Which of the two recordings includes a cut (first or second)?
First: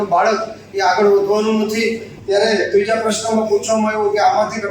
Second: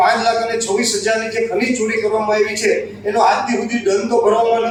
first